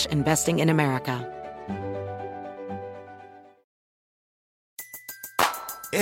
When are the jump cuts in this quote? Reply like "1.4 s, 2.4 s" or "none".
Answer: 1.2 s

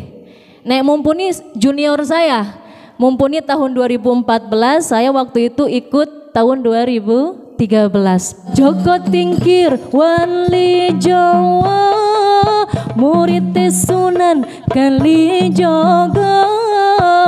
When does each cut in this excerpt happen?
8.5 s

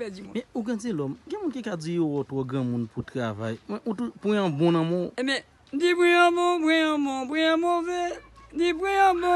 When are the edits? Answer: none

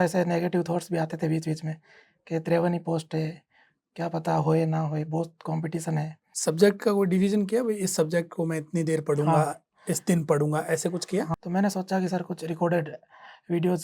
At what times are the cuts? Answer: 6.2 s, 11.3 s

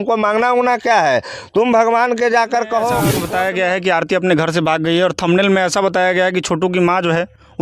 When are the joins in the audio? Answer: 3.2 s

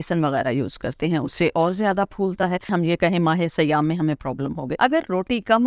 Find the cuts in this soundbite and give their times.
2.7 s, 4.7 s

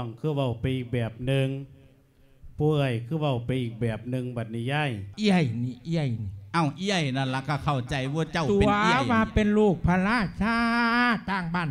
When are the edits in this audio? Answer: 5.0 s

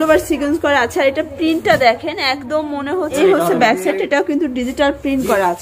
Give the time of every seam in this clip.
3.2 s

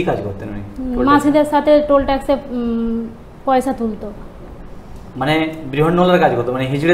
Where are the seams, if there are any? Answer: none

